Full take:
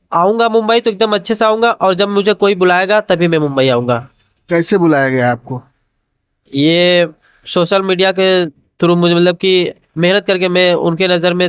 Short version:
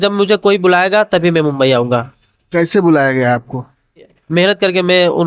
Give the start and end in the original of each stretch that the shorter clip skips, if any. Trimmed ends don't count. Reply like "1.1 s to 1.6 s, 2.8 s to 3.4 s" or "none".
6.1 s to 9.8 s